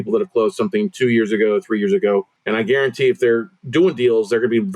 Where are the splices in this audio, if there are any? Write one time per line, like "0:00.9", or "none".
0:02.4